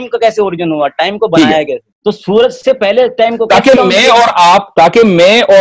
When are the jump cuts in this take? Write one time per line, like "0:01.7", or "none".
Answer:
0:01.9